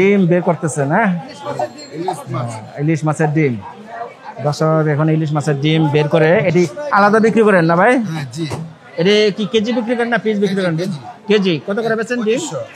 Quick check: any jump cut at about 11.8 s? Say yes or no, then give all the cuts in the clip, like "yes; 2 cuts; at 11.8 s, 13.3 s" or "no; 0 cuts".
no; 0 cuts